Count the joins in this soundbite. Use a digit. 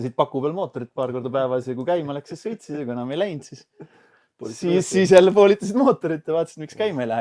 0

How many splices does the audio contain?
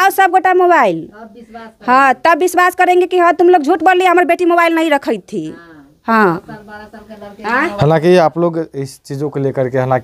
0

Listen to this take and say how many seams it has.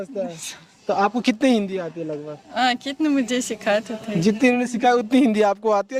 0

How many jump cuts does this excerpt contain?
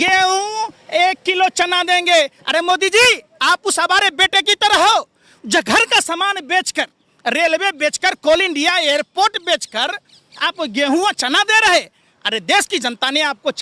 0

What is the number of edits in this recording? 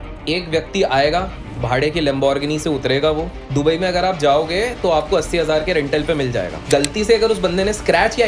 1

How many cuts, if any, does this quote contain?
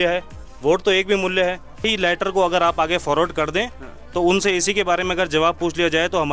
1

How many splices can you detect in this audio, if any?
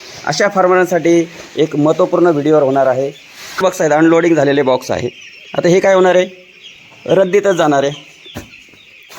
1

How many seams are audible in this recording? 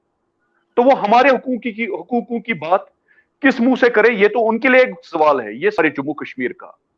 1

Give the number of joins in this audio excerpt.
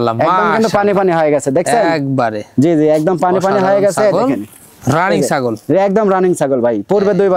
0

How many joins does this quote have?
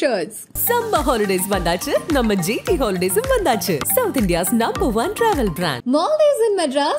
0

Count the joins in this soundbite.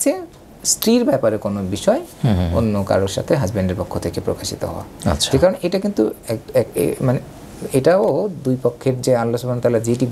0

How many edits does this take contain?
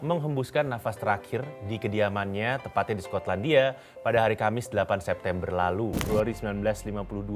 1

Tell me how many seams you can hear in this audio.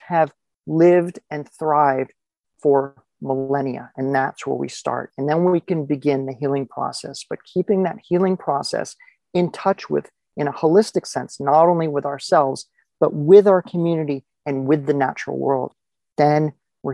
1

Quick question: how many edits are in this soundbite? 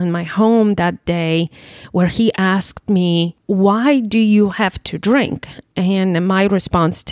1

